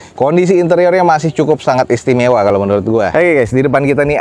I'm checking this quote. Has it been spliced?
yes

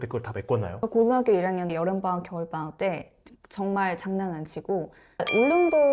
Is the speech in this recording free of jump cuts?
no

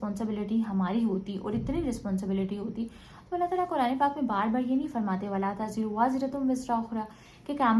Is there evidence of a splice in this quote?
no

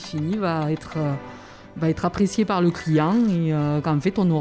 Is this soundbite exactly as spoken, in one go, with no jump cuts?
yes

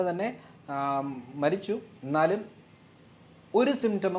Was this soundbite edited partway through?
no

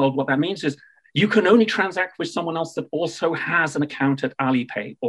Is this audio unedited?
yes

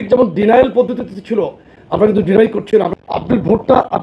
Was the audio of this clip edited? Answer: yes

